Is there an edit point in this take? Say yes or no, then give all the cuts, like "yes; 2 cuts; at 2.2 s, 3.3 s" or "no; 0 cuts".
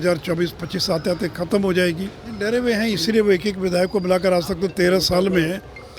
yes; 1 cut; at 2.4 s